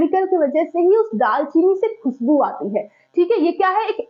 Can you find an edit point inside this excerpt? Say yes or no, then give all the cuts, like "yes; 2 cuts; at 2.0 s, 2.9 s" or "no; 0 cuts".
no; 0 cuts